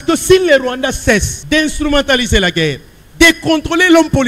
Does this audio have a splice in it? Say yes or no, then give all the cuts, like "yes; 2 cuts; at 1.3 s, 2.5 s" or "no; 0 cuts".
yes; 1 cut; at 1.3 s